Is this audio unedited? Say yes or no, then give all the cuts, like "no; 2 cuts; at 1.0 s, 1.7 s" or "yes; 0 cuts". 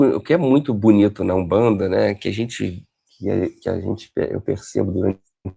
yes; 0 cuts